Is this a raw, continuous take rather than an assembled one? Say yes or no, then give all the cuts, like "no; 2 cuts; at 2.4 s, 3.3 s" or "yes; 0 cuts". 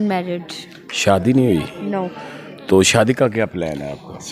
yes; 0 cuts